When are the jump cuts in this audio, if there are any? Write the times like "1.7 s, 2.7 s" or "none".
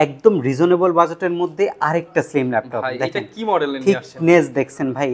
none

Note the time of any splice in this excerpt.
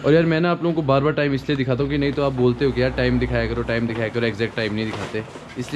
none

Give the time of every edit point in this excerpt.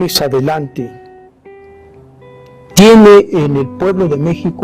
3.1 s

